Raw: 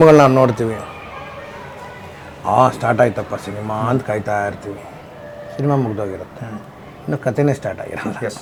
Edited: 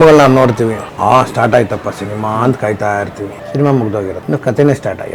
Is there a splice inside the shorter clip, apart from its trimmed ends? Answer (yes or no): yes